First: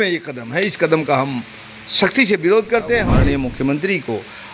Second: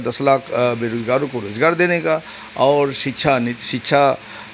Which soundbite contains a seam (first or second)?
first